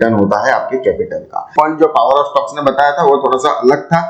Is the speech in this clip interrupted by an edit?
yes; 1 cut; at 1.5 s

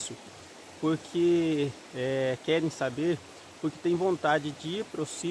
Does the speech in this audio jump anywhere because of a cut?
no; 0 cuts

